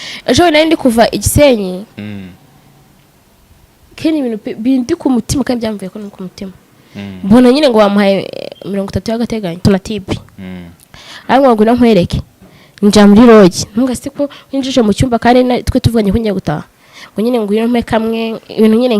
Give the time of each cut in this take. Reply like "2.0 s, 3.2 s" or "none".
9.6 s